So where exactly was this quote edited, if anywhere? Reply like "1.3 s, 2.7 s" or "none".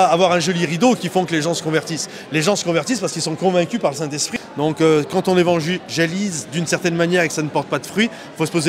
4.3 s

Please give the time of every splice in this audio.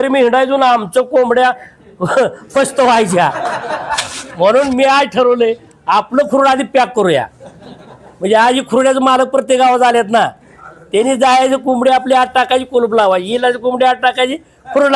none

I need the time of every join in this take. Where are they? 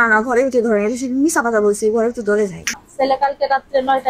2.8 s

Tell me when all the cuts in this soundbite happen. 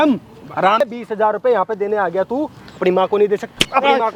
none

